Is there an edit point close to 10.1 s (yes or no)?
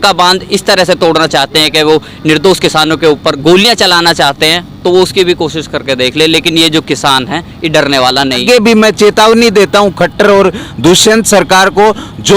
no